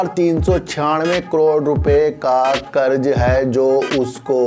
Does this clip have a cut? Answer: no; 0 cuts

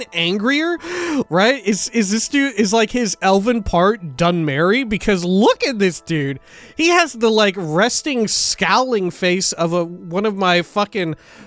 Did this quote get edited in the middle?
yes; 1 cut; at 0.9 s

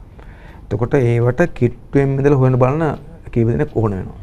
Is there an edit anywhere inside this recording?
no; 0 cuts

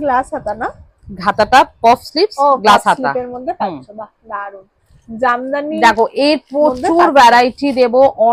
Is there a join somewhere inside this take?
no; 0 cuts

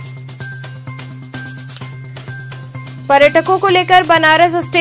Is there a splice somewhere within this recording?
yes; 1 cut; at 1.4 s

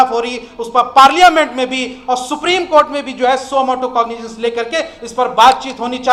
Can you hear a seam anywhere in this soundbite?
no; 0 cuts

